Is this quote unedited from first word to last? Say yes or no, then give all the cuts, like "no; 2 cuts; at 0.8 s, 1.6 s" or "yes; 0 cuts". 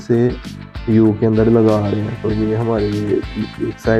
yes; 0 cuts